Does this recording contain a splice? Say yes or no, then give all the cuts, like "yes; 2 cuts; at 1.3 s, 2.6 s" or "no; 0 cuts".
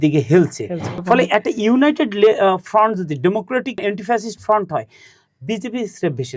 yes; 1 cut; at 1.0 s